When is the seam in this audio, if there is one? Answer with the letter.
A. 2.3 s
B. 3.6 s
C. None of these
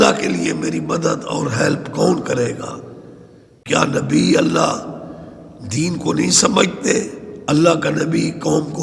B